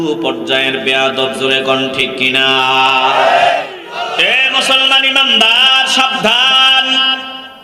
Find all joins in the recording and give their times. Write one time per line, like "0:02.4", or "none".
0:03.7